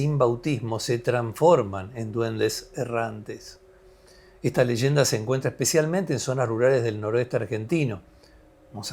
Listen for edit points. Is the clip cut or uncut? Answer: uncut